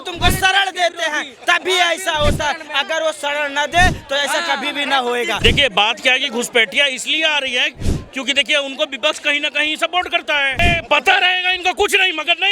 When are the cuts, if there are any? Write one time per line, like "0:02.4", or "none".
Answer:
0:05.4
0:10.6